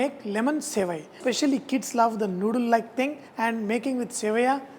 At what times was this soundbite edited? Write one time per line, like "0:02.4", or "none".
0:01.2
0:03.2